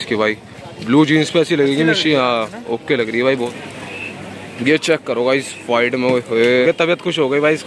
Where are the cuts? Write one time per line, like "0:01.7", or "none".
0:03.5
0:06.6